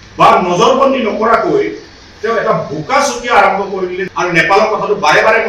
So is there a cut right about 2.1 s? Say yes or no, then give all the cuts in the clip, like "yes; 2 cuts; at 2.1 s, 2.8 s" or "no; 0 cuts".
no; 1 cut; at 4.0 s